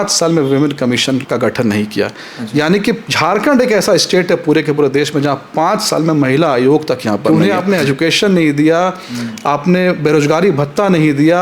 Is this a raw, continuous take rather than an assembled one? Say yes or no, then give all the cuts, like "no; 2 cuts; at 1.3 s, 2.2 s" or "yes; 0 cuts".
no; 2 cuts; at 1.2 s, 7.2 s